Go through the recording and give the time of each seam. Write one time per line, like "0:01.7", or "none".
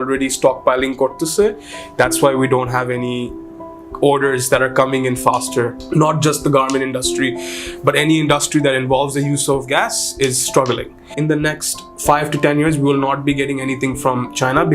0:05.8
0:11.1